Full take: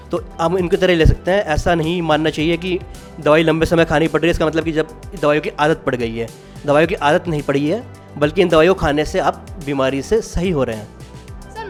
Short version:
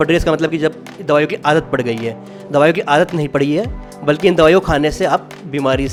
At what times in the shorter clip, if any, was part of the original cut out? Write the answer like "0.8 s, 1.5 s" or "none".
none

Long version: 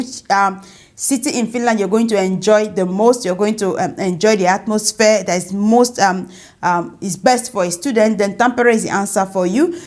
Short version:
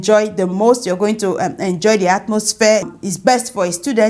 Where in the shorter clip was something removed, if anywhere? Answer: 2.9 s

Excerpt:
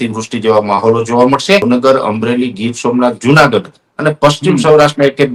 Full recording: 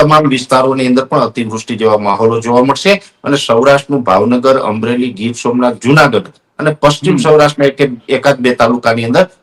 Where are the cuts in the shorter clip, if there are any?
1.6 s

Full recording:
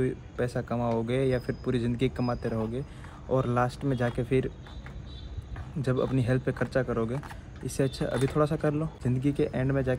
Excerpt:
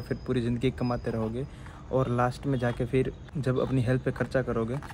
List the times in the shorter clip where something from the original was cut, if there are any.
3.2 s

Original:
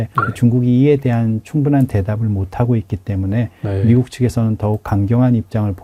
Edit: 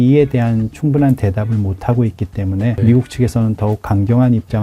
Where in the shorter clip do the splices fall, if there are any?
2.8 s

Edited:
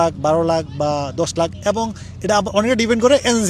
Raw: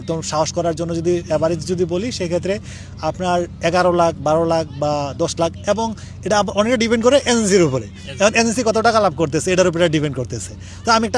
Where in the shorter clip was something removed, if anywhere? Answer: none

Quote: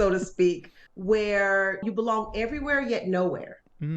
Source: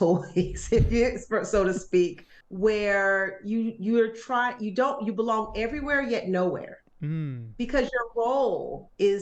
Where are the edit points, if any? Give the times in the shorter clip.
1.8 s

